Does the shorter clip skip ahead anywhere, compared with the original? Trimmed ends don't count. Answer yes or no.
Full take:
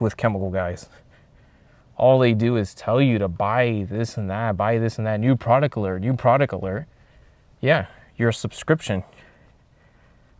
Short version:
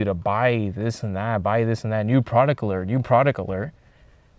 no